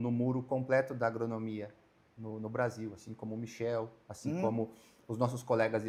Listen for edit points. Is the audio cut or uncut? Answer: uncut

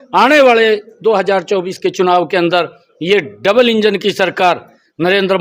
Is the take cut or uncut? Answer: uncut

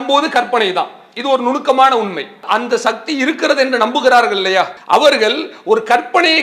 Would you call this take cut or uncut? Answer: cut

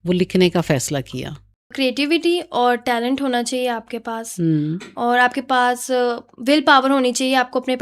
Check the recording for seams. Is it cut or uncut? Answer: cut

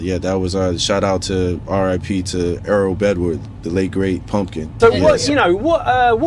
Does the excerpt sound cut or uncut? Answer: cut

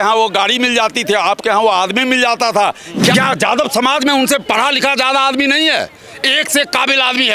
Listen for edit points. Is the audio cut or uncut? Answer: cut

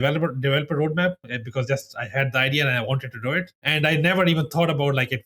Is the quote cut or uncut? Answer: cut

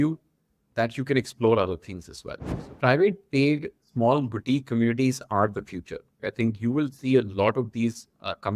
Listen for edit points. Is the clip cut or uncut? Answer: cut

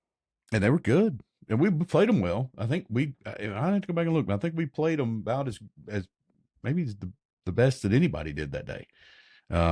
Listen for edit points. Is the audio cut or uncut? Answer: uncut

